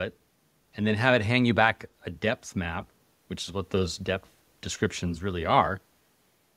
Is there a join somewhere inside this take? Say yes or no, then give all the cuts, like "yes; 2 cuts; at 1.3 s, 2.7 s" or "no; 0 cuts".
no; 0 cuts